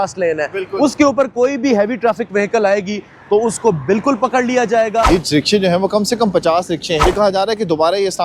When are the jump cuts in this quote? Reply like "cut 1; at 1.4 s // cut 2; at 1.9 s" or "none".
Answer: cut 1; at 5.1 s // cut 2; at 7.0 s

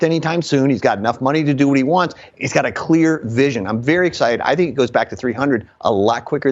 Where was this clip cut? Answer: none

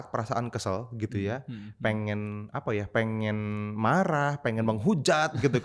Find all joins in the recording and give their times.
none

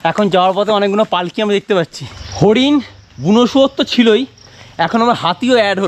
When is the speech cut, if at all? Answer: cut 1; at 2.2 s

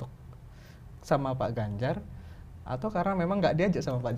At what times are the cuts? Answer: none

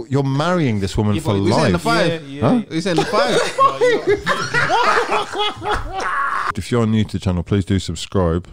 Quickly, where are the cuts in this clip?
cut 1; at 6.5 s

